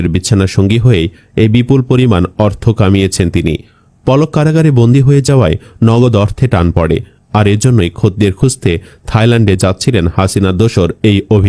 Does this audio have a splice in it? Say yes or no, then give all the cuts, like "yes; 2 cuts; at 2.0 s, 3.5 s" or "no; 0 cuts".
no; 0 cuts